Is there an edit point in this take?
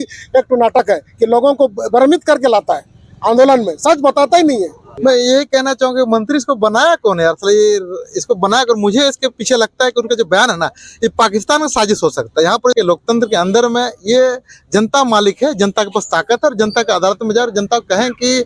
yes; 2 cuts; at 4.8 s, 12.7 s

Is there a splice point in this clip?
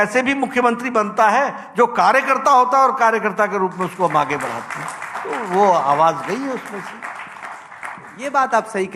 no; 0 cuts

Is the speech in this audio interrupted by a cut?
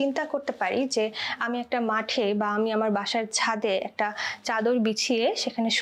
no; 0 cuts

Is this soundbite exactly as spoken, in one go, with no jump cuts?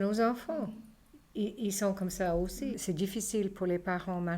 no; 1 cut; at 2.8 s

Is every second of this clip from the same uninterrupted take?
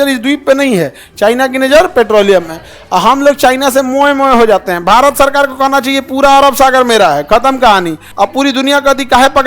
no; 1 cut; at 8.0 s

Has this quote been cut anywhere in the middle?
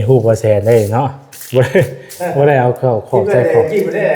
no; 0 cuts

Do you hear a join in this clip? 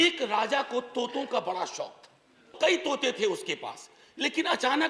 yes; 1 cut; at 2.5 s

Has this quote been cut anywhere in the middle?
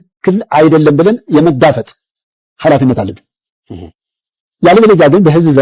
no; 0 cuts

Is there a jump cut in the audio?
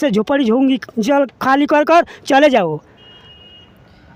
no; 0 cuts

